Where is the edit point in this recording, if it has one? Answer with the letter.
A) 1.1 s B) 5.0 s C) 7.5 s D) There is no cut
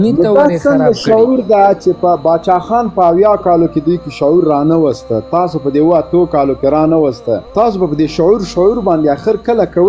C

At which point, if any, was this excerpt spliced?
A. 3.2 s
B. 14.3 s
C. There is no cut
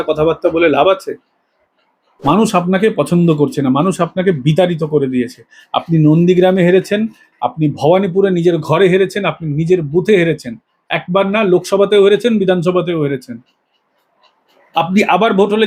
C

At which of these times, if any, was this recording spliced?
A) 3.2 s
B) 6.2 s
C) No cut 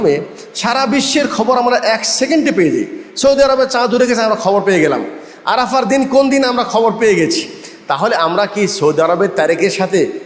C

